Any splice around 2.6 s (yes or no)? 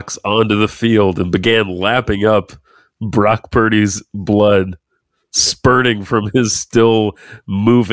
no